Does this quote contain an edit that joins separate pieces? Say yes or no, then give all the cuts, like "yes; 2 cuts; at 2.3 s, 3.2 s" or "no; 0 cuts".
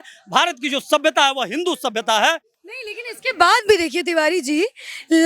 no; 0 cuts